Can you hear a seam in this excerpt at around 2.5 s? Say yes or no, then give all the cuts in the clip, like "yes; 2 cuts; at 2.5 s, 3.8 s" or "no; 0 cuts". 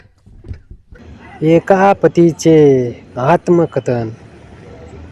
no; 1 cut; at 1.0 s